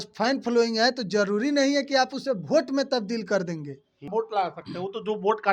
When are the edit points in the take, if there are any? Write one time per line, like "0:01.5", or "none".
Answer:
0:04.1

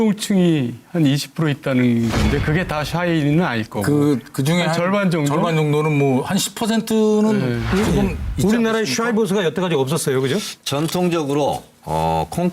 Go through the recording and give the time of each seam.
0:05.7

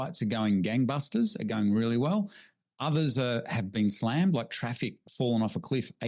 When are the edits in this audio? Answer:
none

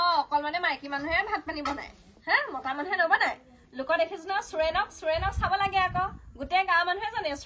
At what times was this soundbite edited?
none

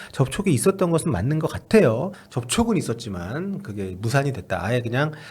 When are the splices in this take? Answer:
0:02.1

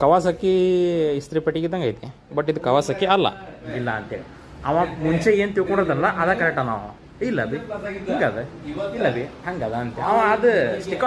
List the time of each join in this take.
0:03.6

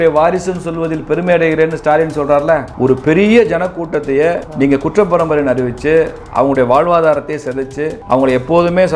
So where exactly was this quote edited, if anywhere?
0:04.5
0:07.9

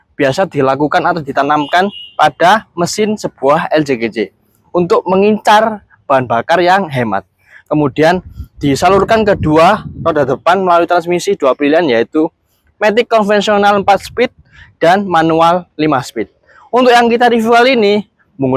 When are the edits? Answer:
0:01.2

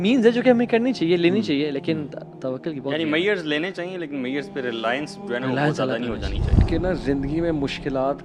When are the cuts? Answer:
0:06.6

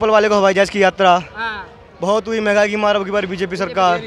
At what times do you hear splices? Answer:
none

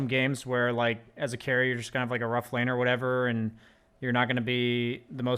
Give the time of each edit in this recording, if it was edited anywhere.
none

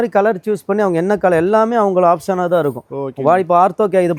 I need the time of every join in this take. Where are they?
none

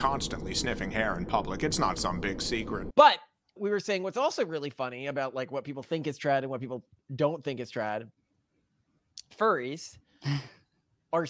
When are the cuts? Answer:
0:02.8

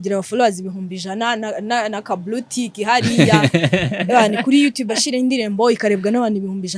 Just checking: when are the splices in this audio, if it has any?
none

